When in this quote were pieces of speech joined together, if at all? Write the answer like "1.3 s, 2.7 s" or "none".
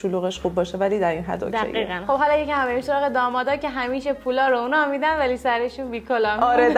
2.0 s